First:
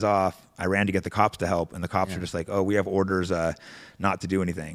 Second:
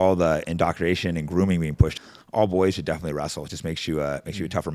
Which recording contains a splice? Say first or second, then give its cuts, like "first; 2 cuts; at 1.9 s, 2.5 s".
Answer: second; 1 cut; at 2.0 s